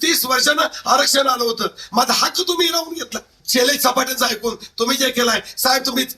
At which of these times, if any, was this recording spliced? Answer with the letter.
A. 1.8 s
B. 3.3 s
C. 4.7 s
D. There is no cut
B